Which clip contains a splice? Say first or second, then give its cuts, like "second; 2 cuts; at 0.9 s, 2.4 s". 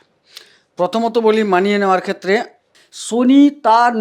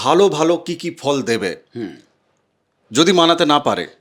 first; 1 cut; at 2.6 s